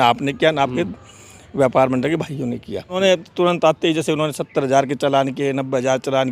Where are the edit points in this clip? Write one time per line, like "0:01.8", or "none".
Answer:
0:03.0